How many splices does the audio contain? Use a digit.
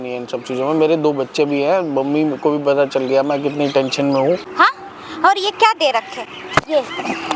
1